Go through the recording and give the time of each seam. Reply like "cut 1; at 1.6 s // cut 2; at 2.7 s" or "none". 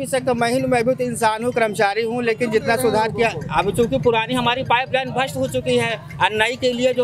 none